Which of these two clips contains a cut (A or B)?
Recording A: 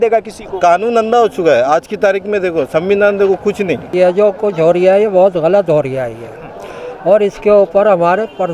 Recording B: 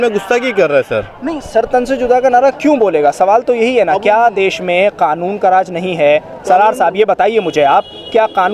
A